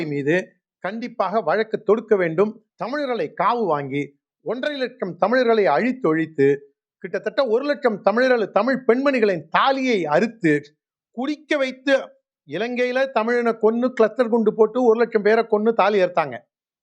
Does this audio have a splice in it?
yes; 1 cut; at 2.7 s

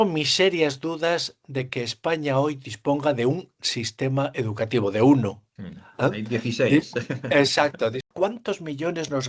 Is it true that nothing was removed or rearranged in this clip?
no; 1 cut; at 8.1 s

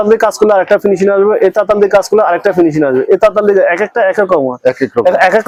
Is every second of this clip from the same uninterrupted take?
yes; 0 cuts

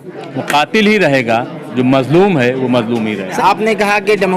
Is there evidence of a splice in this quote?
yes; 1 cut; at 3.4 s

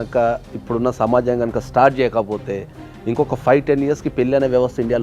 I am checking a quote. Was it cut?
no; 0 cuts

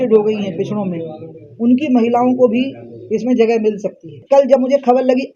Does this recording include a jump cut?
yes; 1 cut; at 4.2 s

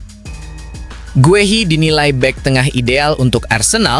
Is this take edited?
yes; 1 cut; at 1.1 s

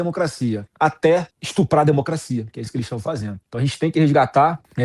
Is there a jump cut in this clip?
no; 0 cuts

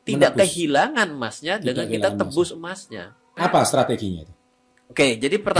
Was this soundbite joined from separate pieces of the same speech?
yes; 1 cut; at 3.4 s

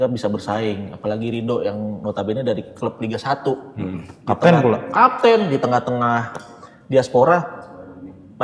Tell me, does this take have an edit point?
no; 0 cuts

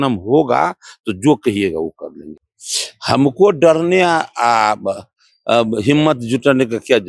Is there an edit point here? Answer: yes; 1 cut; at 2.3 s

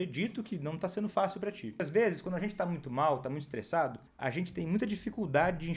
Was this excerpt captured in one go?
no; 2 cuts; at 1.8 s, 4.1 s

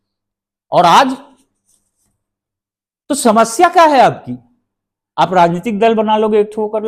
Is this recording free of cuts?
yes; 0 cuts

